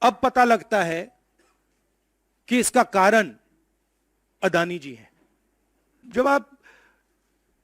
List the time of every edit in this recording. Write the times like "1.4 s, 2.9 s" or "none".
6.0 s

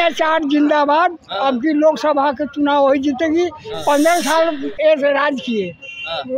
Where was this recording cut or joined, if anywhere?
none

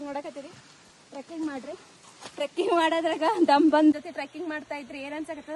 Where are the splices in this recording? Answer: 3.9 s

